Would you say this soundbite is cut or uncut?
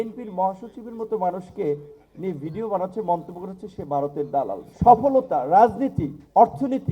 cut